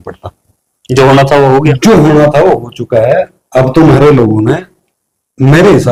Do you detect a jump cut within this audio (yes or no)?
no